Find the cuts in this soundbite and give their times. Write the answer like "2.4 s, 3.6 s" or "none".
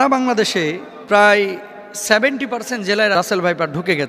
0.9 s, 3.1 s